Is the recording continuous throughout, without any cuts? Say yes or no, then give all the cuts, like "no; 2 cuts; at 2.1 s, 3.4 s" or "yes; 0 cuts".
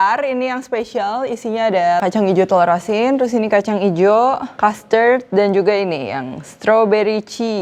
yes; 0 cuts